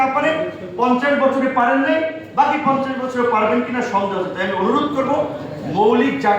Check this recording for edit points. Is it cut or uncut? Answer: uncut